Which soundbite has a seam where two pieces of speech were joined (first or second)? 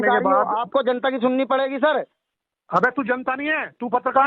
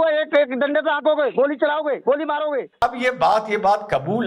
second